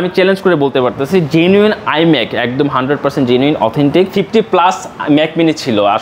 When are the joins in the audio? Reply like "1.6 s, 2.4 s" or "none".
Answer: 4.1 s